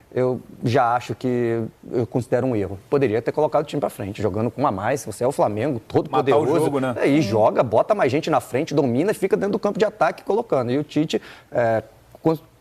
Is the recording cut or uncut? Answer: uncut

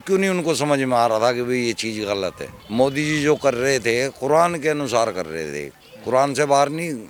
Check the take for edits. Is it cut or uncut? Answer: uncut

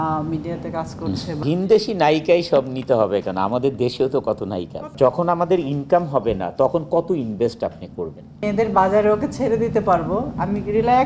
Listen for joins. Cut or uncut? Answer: cut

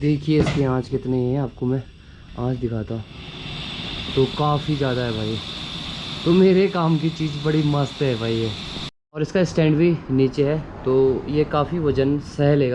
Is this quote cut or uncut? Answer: uncut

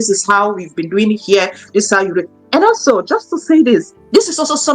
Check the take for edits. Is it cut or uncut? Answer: uncut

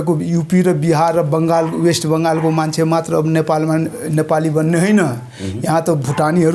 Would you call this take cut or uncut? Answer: uncut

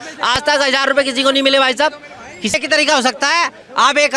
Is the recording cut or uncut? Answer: cut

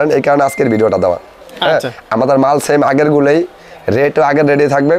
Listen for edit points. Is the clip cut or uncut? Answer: uncut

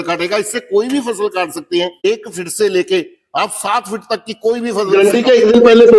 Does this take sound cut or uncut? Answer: cut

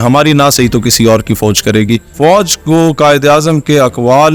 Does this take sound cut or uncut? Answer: cut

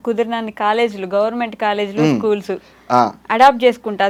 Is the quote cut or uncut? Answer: uncut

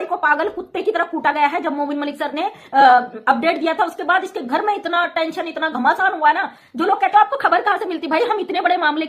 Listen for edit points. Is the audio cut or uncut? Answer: uncut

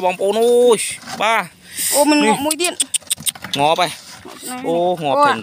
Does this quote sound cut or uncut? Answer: uncut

